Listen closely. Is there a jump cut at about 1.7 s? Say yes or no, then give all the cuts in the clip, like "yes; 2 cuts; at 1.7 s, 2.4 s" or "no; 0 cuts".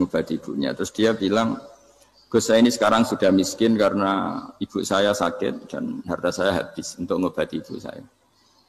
no; 0 cuts